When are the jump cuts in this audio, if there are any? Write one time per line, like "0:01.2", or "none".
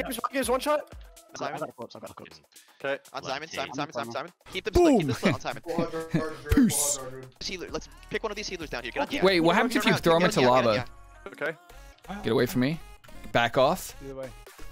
0:01.3
0:07.4
0:11.3